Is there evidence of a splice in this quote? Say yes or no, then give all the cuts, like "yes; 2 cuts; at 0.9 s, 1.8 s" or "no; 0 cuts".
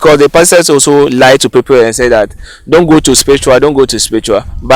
no; 0 cuts